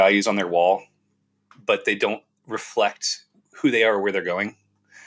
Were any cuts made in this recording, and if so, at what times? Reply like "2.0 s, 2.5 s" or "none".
none